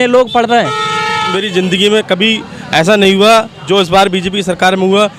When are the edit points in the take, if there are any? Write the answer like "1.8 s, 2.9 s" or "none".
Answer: 1.3 s